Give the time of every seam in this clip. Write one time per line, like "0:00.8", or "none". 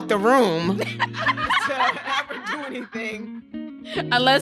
none